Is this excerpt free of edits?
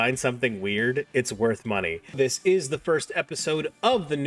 no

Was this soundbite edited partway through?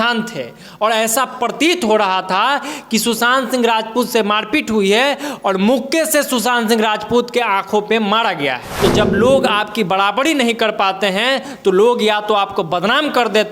yes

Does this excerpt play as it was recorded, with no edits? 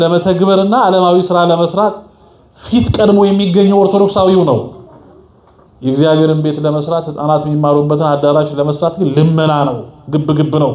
yes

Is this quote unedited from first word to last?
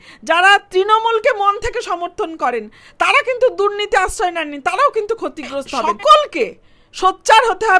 no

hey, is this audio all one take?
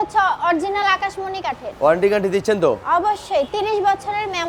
yes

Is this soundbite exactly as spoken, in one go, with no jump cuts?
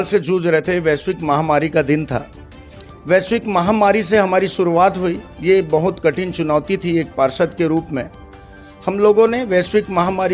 yes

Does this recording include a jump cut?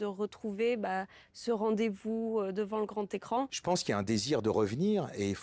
yes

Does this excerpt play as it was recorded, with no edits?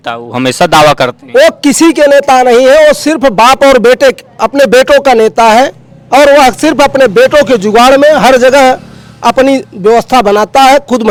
yes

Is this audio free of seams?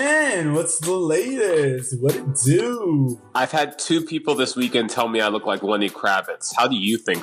yes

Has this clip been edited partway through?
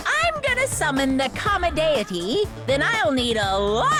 no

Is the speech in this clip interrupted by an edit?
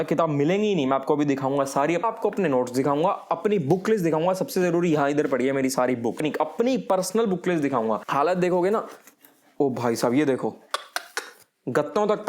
yes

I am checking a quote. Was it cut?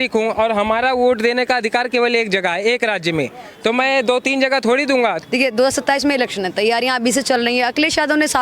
yes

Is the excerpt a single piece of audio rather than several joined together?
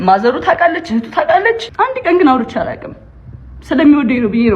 no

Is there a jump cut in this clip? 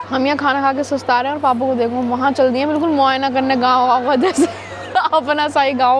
no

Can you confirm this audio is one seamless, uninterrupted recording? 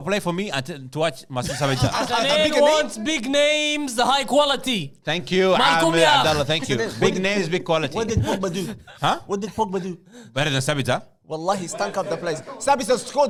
yes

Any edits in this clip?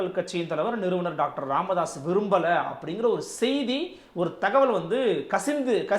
no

